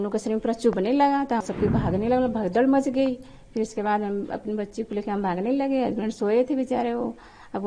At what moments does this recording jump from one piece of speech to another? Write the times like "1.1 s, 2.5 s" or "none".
1.4 s